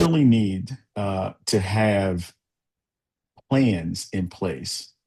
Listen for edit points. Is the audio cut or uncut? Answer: uncut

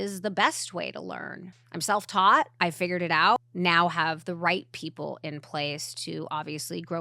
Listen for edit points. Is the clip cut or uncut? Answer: cut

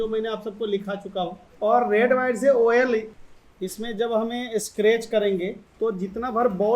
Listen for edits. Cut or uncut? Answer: cut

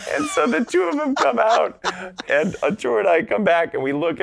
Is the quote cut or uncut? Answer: cut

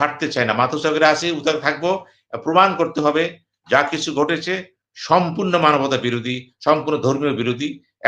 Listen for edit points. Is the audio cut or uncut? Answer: uncut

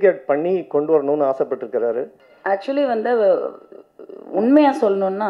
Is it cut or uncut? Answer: cut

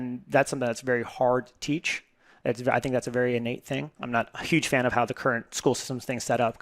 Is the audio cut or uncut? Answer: cut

